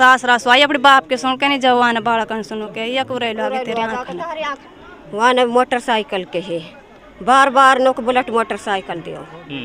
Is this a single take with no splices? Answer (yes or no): no